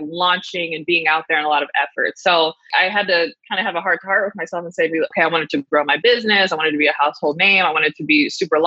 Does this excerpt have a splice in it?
yes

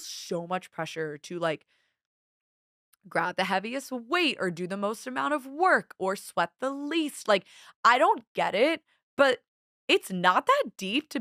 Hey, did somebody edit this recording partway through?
no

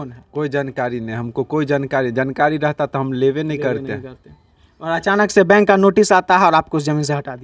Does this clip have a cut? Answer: no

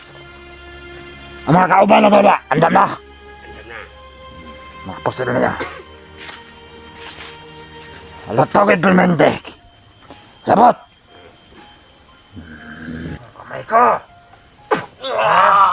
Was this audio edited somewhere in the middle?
yes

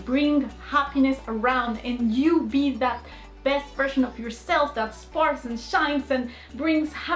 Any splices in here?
no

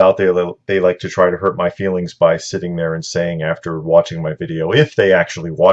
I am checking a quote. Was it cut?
yes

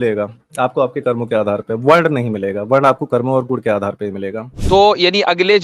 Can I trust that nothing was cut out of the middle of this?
no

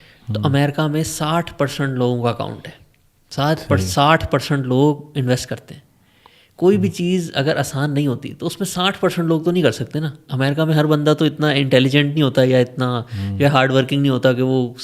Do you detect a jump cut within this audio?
no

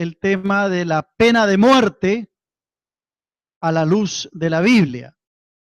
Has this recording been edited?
no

